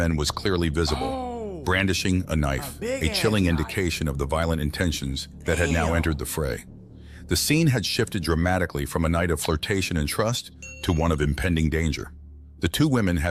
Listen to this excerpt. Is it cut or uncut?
uncut